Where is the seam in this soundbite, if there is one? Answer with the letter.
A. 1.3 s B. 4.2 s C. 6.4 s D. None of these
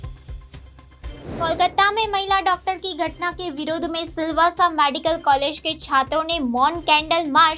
A